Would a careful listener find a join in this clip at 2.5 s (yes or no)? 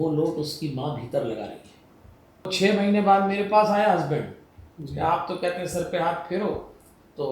yes